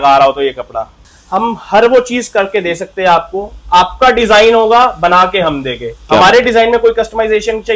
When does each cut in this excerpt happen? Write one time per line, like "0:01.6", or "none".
0:01.0